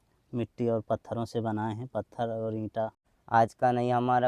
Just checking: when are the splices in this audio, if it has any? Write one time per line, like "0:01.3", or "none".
0:03.1